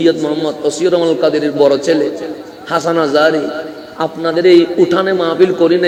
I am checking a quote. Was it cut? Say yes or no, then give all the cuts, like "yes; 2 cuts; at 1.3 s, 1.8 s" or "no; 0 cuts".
no; 0 cuts